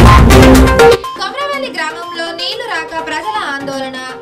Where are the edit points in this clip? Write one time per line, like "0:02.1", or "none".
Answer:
none